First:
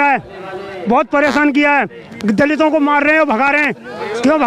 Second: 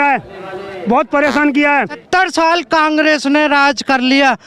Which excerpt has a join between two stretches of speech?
second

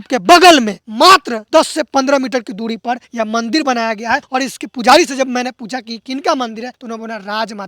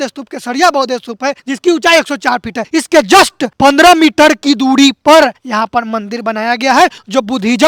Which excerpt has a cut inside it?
first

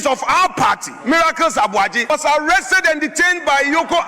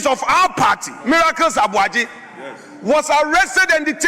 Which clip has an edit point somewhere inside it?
first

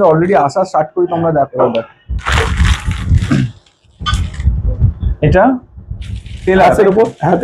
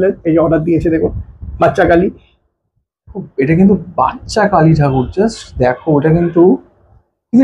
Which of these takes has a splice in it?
first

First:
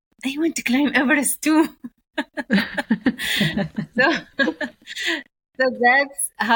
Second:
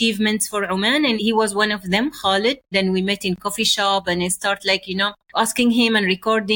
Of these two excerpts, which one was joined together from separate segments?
second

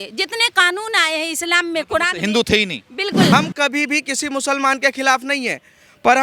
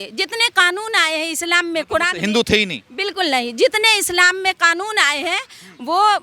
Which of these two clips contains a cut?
first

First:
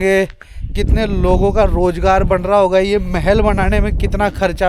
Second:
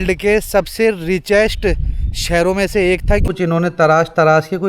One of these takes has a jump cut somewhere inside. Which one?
second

